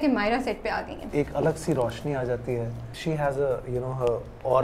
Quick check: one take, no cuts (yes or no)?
no